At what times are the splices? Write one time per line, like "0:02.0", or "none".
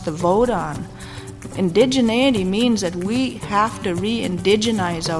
0:01.5